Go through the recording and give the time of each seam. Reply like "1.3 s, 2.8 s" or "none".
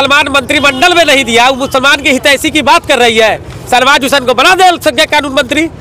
none